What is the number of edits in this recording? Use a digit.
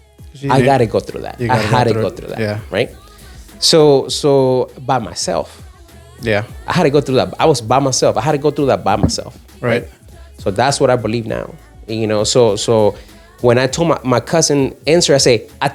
0